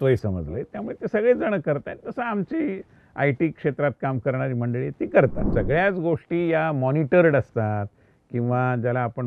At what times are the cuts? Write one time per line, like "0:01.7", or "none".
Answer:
0:05.4